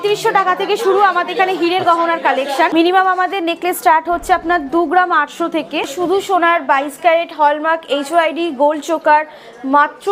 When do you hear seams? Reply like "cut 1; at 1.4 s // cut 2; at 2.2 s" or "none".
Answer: cut 1; at 2.7 s // cut 2; at 5.9 s